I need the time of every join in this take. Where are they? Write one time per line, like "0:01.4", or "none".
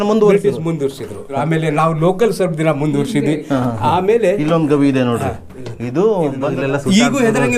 0:01.3
0:06.5